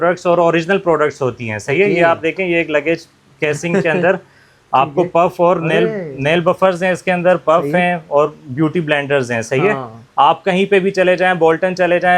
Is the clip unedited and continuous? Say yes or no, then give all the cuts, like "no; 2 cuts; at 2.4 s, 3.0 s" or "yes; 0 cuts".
yes; 0 cuts